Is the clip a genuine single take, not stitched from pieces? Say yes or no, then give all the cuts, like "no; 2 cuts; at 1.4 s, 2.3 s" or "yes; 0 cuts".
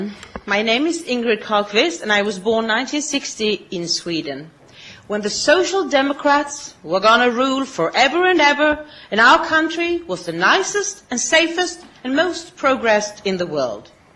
no; 1 cut; at 9.1 s